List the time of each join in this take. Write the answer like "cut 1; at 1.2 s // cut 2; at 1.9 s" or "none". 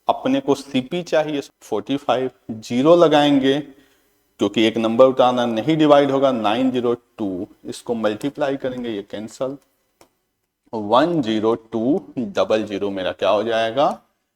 cut 1; at 1.4 s